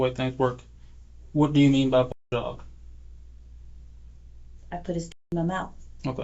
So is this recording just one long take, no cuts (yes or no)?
yes